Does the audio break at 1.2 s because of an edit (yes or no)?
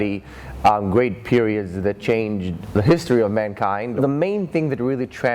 no